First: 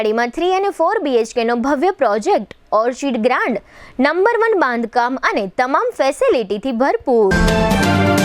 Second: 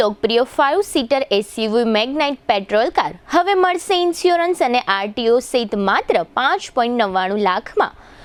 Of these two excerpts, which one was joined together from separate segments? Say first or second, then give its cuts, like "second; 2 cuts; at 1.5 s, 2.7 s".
first; 1 cut; at 7.3 s